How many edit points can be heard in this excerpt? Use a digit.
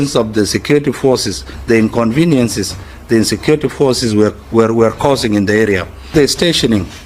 1